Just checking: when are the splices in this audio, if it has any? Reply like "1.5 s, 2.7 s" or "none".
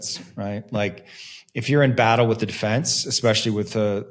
none